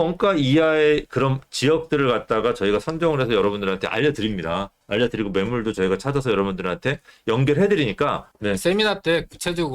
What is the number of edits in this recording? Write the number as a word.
one